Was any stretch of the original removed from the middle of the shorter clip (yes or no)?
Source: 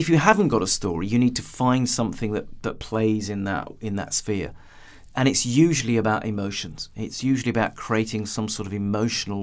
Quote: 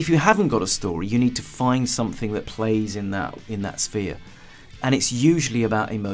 yes